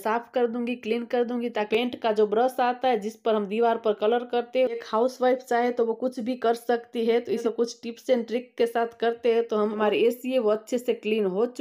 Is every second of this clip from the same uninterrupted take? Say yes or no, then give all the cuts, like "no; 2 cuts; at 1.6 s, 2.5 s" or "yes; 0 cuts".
no; 4 cuts; at 1.7 s, 4.8 s, 7.4 s, 9.8 s